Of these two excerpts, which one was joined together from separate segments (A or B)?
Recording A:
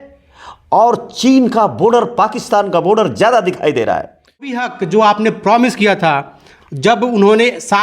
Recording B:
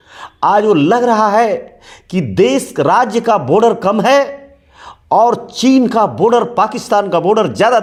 A